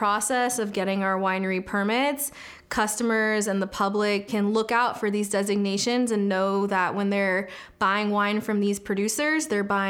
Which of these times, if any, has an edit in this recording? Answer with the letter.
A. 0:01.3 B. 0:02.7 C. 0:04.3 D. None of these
C